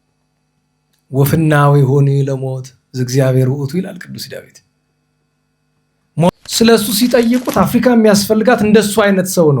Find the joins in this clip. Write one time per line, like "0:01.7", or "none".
0:06.3